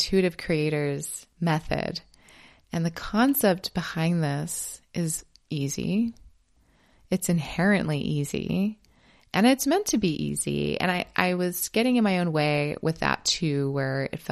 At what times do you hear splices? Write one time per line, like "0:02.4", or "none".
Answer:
none